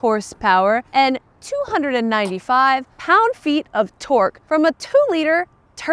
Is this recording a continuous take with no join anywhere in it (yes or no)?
no